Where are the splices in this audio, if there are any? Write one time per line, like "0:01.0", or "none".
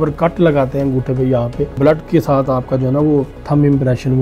0:01.7
0:03.4